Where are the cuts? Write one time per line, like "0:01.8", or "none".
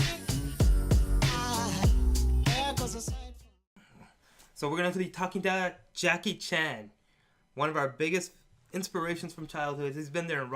0:05.8